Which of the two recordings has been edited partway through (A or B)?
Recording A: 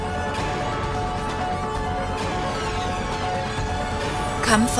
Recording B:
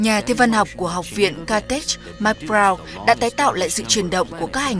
A